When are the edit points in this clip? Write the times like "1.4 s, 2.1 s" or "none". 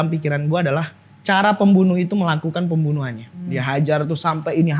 3.5 s